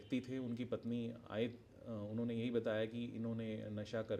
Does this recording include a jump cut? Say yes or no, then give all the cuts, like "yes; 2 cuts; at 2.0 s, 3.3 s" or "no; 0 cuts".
no; 0 cuts